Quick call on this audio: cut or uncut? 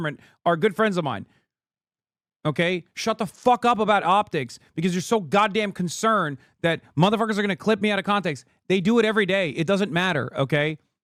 uncut